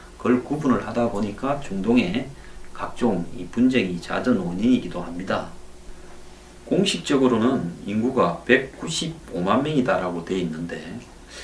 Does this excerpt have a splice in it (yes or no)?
no